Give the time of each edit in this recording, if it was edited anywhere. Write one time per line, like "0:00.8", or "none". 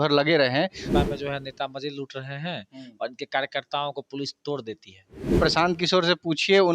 0:00.8
0:05.4